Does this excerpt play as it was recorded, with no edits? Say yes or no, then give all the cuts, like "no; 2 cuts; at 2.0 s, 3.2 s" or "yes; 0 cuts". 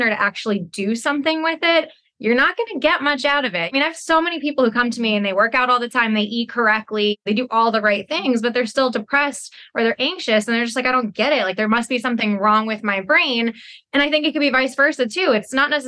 yes; 0 cuts